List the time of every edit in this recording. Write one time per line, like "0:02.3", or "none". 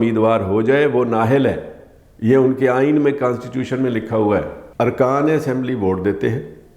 none